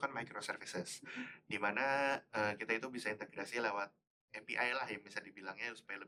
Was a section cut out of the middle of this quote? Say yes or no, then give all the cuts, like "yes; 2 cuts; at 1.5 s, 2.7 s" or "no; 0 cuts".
no; 0 cuts